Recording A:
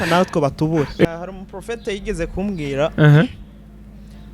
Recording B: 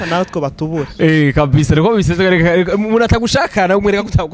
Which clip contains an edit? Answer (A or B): A